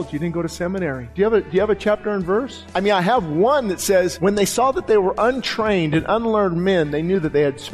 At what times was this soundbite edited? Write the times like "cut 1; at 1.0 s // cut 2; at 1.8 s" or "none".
cut 1; at 1.0 s // cut 2; at 2.6 s // cut 3; at 4.1 s